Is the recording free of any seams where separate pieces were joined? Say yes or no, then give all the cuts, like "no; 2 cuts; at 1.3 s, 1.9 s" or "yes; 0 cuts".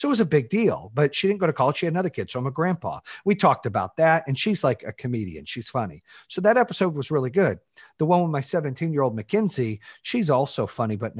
yes; 0 cuts